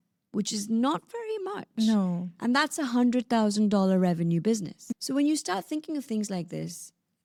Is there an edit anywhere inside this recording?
no; 0 cuts

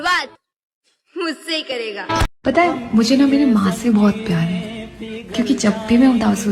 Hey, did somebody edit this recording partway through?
no; 0 cuts

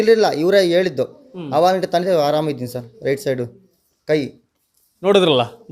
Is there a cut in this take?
no; 0 cuts

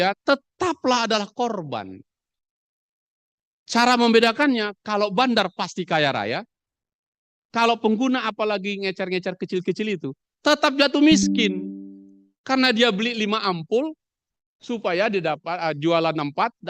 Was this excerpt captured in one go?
yes; 0 cuts

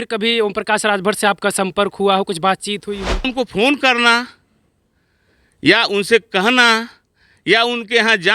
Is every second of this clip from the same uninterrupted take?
no; 1 cut; at 3.3 s

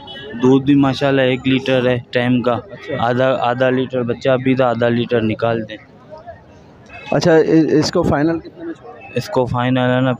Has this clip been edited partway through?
no; 0 cuts

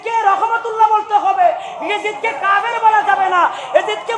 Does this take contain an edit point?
no; 0 cuts

